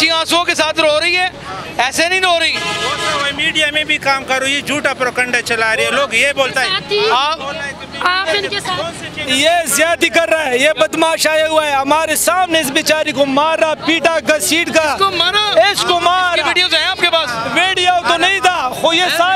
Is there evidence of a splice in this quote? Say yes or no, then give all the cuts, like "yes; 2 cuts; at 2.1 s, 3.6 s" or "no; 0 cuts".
no; 0 cuts